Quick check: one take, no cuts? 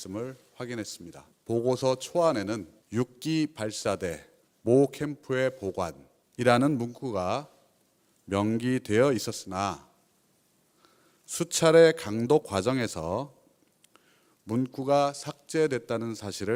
yes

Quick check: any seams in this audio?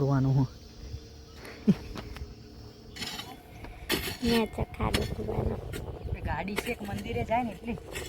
yes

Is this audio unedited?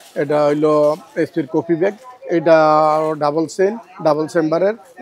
yes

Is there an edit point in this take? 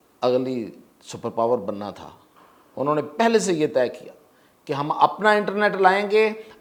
no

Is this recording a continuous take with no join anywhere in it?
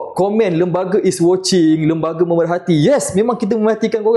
yes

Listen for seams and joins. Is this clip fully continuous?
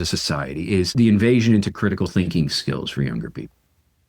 no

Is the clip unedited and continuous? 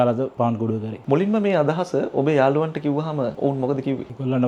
yes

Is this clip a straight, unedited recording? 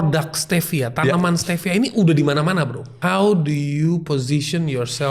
no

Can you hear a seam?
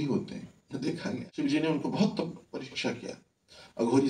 yes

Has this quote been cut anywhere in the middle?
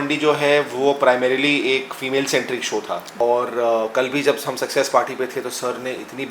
yes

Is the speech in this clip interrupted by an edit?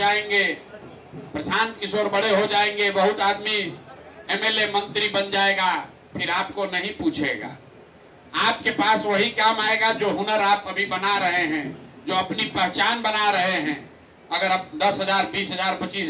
no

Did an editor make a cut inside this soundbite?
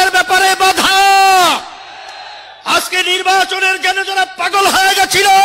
no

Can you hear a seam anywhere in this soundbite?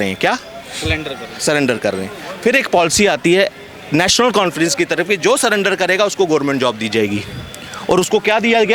no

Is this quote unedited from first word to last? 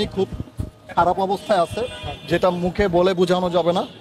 yes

